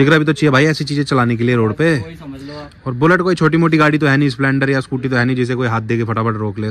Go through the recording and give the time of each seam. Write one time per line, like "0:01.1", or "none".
none